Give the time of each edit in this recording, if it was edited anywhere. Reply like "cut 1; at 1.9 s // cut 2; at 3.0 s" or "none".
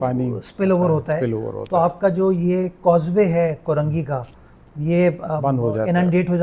none